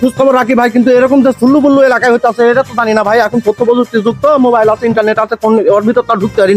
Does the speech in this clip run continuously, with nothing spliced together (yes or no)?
yes